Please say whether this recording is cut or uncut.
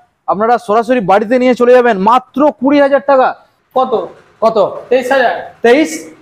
cut